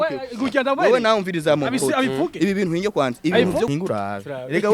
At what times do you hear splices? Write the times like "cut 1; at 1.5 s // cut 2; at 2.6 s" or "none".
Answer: cut 1; at 3.7 s